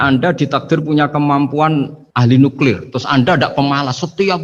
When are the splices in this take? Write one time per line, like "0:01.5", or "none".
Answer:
0:02.0